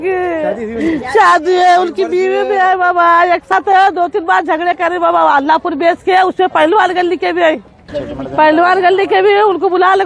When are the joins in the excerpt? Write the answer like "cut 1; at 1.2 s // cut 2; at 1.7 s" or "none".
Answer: cut 1; at 3.5 s // cut 2; at 8.0 s